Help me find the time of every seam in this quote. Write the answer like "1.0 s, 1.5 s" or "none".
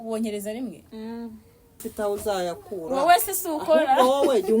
1.9 s